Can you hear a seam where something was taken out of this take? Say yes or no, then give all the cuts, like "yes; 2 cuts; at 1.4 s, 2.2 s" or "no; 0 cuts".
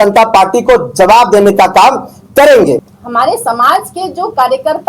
yes; 1 cut; at 3.0 s